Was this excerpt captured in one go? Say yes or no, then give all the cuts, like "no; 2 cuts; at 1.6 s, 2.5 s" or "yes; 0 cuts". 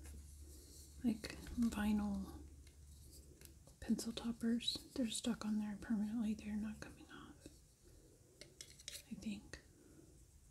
yes; 0 cuts